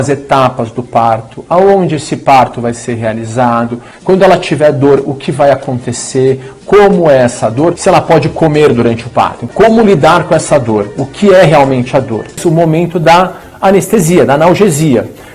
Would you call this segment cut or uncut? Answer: cut